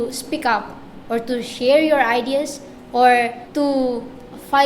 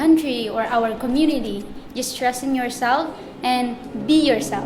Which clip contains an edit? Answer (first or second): first